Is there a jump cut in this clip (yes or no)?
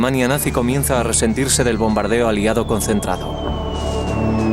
yes